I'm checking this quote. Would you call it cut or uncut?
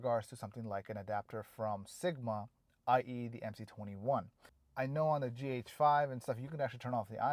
cut